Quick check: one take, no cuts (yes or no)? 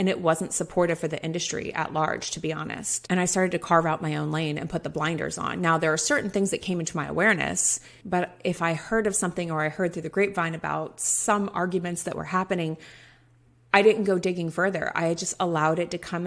no